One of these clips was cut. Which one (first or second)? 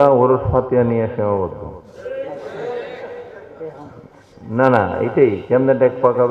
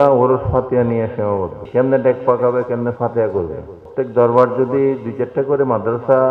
second